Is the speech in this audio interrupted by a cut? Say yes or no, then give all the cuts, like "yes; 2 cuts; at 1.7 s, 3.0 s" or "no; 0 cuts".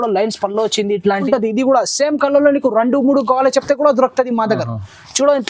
yes; 1 cut; at 1.2 s